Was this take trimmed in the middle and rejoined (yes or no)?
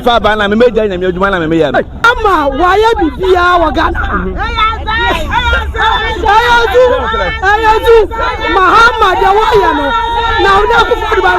yes